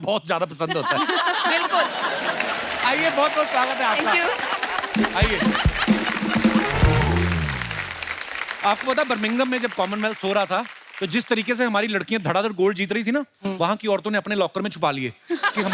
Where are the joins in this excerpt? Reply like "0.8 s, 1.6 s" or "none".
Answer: none